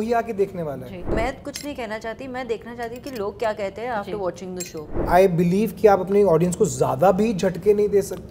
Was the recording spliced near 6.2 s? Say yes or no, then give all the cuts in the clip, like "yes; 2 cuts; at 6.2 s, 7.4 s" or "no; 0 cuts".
no; 2 cuts; at 1.1 s, 4.9 s